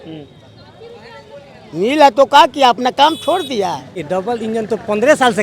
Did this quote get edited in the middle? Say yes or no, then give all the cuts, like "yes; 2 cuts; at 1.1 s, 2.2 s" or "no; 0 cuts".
yes; 1 cut; at 4.0 s